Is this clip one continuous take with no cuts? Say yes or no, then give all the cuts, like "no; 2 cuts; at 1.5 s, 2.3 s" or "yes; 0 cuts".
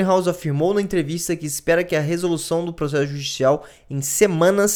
yes; 0 cuts